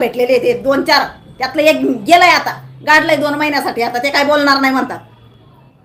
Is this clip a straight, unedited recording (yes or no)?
yes